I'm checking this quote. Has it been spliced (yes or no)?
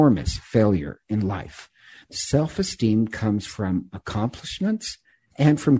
yes